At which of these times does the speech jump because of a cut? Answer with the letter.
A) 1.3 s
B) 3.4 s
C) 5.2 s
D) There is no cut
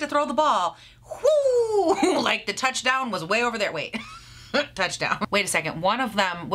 C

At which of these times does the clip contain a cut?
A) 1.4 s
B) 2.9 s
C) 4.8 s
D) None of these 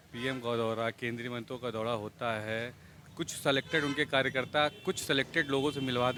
D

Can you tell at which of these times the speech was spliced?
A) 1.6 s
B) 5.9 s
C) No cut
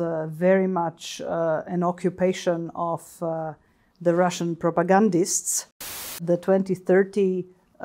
B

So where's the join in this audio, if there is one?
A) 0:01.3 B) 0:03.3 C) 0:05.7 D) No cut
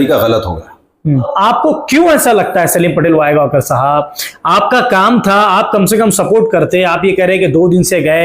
A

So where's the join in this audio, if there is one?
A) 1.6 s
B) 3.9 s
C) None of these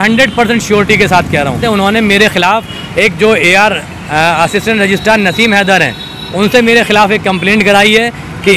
A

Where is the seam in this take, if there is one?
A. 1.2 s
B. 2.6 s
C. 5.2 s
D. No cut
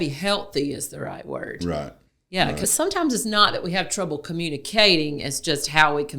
B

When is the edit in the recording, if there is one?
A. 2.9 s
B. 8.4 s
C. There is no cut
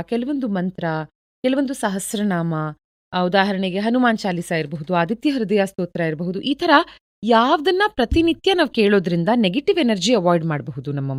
C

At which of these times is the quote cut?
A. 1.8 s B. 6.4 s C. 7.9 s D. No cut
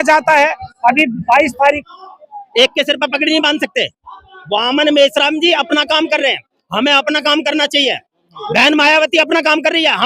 A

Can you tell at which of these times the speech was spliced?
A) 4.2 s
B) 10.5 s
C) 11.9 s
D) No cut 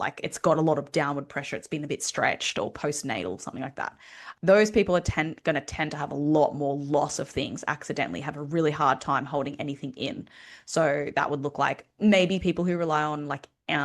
A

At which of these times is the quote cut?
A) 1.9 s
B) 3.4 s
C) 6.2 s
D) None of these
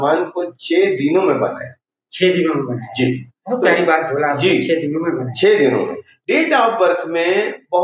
C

